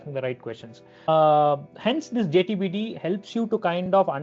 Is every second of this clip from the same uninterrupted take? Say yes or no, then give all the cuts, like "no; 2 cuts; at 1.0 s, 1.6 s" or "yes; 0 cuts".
no; 1 cut; at 1.1 s